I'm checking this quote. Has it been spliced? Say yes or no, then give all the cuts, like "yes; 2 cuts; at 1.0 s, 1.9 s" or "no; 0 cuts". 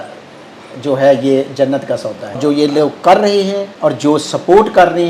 yes; 2 cuts; at 2.4 s, 3.7 s